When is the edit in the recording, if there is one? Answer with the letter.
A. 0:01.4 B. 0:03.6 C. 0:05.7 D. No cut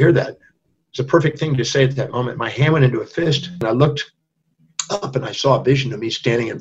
B